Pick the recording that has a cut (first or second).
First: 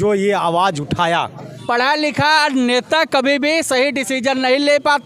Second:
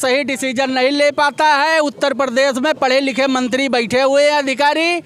first